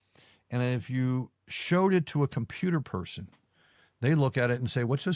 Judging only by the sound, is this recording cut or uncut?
uncut